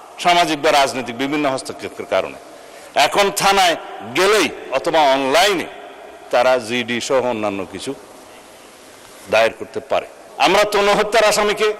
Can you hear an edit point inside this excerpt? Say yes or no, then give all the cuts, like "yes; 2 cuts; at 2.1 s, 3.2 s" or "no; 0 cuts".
yes; 1 cut; at 10.2 s